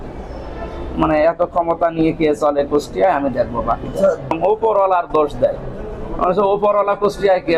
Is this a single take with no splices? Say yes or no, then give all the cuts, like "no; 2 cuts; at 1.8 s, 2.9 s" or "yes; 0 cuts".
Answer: no; 1 cut; at 4.3 s